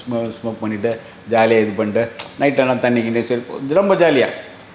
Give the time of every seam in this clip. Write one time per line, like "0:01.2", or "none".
none